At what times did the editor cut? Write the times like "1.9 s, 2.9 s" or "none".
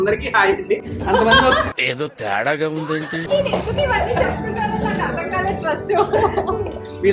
none